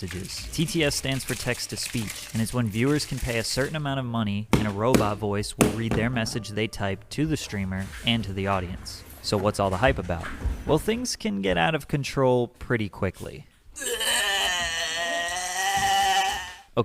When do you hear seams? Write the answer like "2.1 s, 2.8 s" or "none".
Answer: 15.3 s

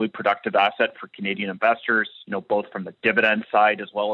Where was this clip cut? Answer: none

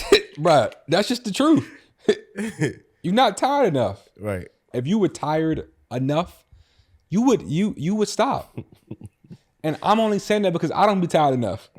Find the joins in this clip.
4.7 s

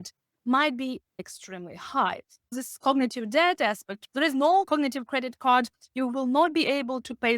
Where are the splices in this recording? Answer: none

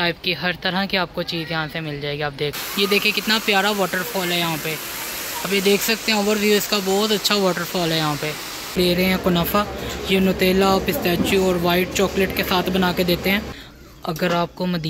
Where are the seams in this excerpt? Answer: 2.6 s, 8.8 s, 13.6 s

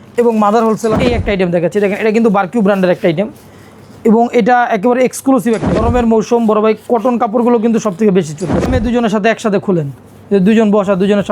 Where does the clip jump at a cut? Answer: 1.0 s, 5.8 s, 8.7 s

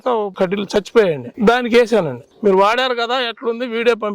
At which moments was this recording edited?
1.3 s, 2.2 s

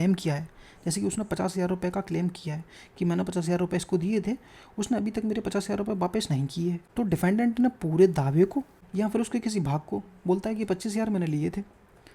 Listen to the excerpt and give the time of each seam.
6.8 s, 8.8 s

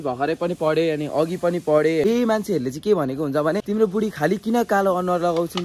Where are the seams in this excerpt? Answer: 2.0 s, 3.6 s

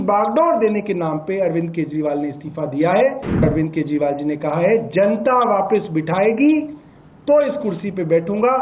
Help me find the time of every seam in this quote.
3.4 s

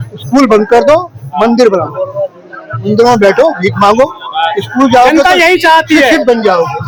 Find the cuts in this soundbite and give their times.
none

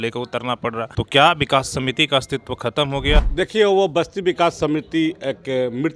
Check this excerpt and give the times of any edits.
0.9 s, 3.2 s

